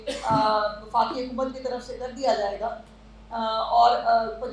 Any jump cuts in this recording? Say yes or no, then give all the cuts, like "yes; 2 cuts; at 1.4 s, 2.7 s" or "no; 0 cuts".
no; 0 cuts